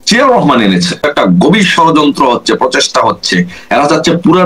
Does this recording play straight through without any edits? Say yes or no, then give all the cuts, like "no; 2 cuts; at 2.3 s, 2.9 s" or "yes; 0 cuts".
no; 1 cut; at 1.0 s